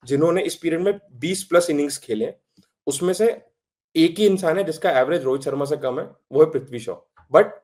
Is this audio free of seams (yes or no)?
yes